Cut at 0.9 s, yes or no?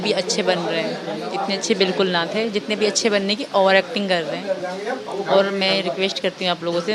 yes